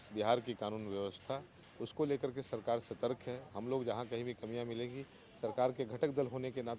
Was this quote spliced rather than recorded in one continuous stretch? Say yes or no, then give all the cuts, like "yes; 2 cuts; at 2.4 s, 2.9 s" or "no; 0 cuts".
no; 0 cuts